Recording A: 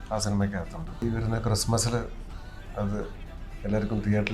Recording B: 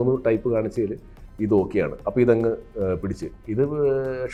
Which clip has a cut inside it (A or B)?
A